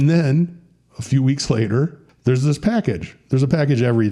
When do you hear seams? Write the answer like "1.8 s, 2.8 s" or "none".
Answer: 2.0 s

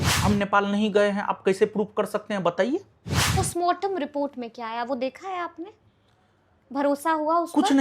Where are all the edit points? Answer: 3.4 s

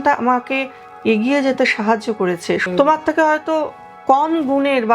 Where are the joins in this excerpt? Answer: 2.6 s

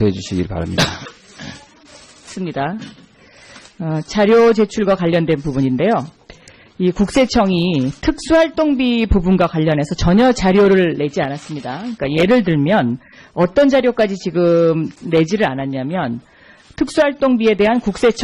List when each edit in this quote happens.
none

